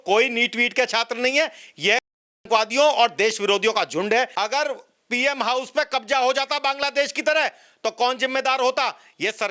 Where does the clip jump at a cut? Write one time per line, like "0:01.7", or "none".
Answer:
0:04.3